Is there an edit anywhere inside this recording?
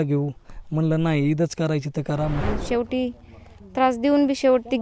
yes; 1 cut; at 2.4 s

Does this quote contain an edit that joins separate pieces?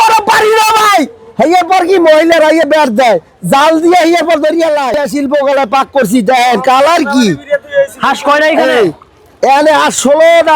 yes; 1 cut; at 5.0 s

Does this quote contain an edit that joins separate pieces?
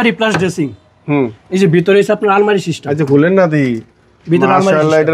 no; 0 cuts

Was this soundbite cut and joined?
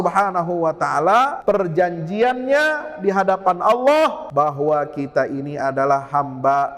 yes; 2 cuts; at 1.4 s, 4.2 s

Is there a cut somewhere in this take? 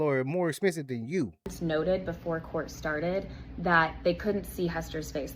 no; 0 cuts

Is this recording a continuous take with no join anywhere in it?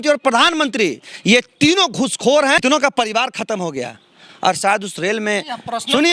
no; 1 cut; at 2.6 s

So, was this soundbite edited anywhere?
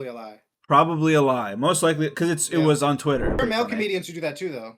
yes; 1 cut; at 3.4 s

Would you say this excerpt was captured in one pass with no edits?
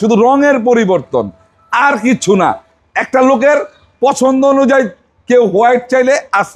yes; 0 cuts

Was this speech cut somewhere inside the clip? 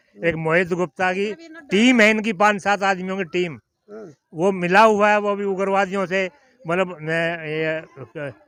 no; 0 cuts

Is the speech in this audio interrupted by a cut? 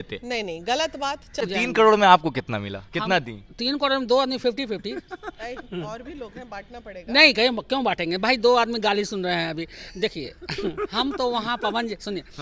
yes; 1 cut; at 1.4 s

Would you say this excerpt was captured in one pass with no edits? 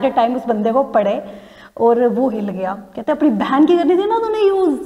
yes; 0 cuts

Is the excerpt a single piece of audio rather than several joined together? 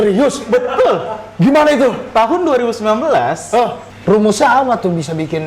no; 1 cut; at 3.9 s

